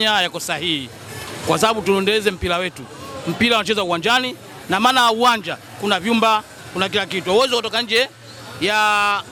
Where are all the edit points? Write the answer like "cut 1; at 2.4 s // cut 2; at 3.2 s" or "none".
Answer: none